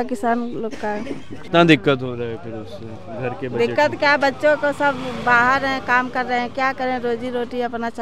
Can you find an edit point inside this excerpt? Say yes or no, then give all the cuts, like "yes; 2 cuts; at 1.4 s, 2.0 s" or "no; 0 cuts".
yes; 1 cut; at 1.5 s